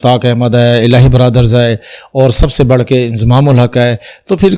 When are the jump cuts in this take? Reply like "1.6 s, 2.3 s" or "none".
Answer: none

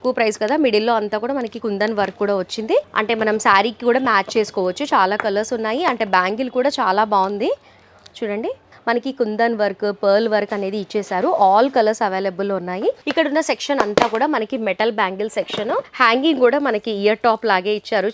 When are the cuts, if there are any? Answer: 2.8 s, 8.7 s, 13.0 s, 15.9 s

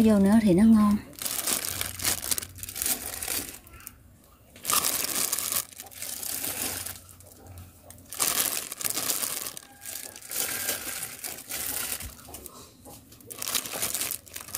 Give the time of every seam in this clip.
none

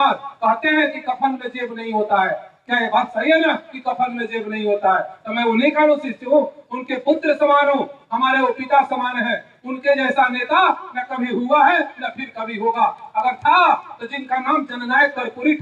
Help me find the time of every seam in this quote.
none

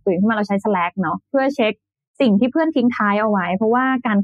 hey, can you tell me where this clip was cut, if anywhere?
1.2 s

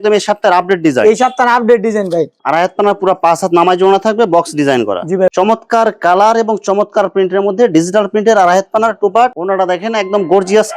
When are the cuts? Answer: 2.3 s, 5.3 s, 9.3 s

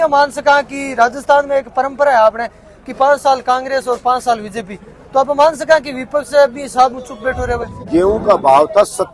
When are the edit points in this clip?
7.7 s

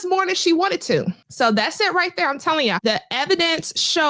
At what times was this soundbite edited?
1.2 s, 2.8 s

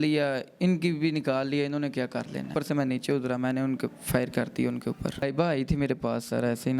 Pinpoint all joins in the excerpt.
2.5 s, 5.2 s

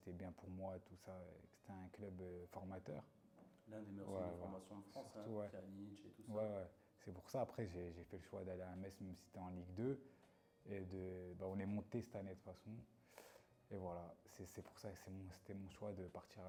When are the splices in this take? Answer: none

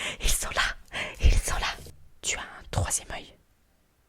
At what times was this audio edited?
1.9 s

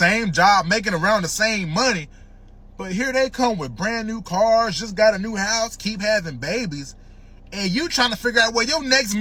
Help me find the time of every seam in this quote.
none

